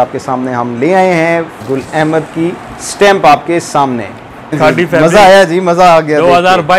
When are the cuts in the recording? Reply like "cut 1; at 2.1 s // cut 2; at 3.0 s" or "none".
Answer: cut 1; at 1.6 s // cut 2; at 4.6 s